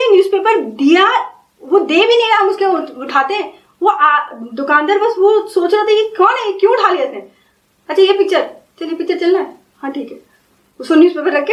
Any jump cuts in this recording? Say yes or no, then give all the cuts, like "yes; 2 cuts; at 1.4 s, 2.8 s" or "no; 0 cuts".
no; 0 cuts